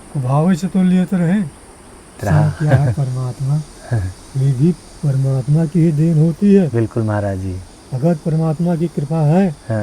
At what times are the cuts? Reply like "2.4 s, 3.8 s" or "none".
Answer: 2.2 s